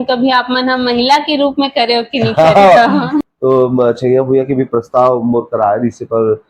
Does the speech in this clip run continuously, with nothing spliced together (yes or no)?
no